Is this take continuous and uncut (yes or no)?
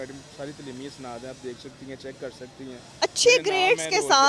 yes